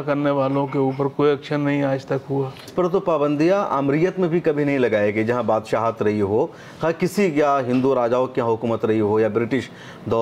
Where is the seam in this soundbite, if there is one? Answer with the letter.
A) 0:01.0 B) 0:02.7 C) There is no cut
B